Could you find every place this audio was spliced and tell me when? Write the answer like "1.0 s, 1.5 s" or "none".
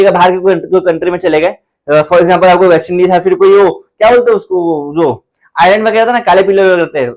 none

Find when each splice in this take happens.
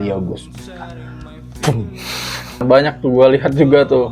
2.6 s

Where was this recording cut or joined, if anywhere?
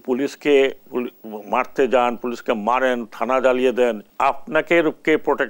4.1 s

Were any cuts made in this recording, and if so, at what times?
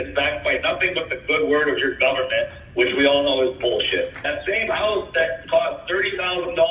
4.2 s

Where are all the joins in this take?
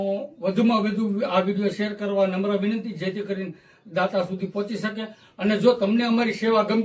none

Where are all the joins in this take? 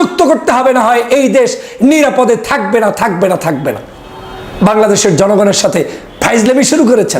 none

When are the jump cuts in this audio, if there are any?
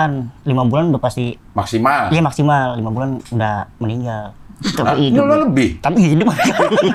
none

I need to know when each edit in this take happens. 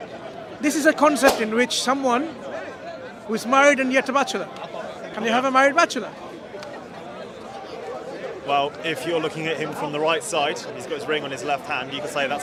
none

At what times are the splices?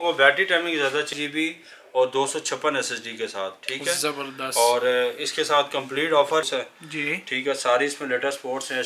1.1 s, 6.4 s

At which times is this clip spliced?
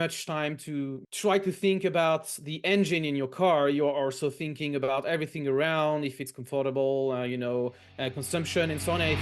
1.0 s

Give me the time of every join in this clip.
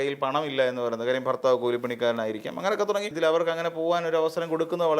3.1 s

